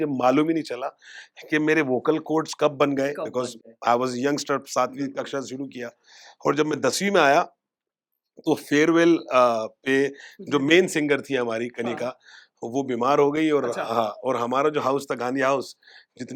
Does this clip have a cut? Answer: no; 0 cuts

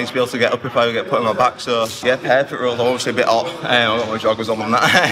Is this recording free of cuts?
yes; 0 cuts

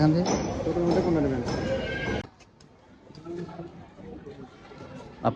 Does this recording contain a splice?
yes; 1 cut; at 2.2 s

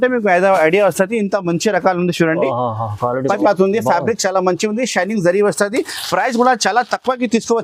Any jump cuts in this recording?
yes; 1 cut; at 3.4 s

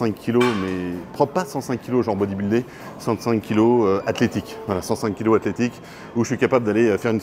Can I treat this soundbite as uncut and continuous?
yes; 0 cuts

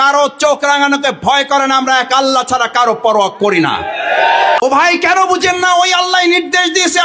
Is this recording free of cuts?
no; 1 cut; at 4.6 s

